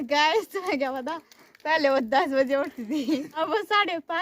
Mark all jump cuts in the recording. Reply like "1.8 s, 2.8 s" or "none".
3.3 s